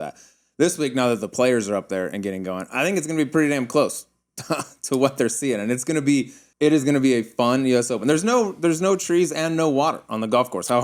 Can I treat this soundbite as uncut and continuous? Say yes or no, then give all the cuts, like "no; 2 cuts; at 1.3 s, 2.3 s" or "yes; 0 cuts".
yes; 0 cuts